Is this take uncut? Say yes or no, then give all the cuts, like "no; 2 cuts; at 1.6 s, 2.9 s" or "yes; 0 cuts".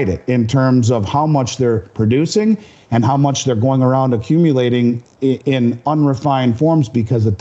yes; 0 cuts